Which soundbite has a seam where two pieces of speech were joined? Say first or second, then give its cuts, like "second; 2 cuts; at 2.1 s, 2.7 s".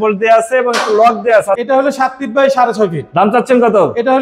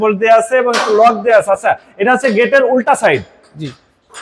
first; 1 cut; at 1.6 s